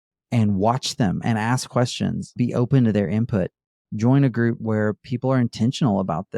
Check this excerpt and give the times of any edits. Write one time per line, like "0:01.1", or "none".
0:02.3
0:04.6